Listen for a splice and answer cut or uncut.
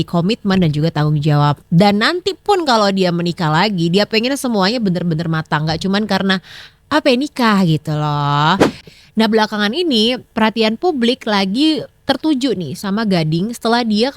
cut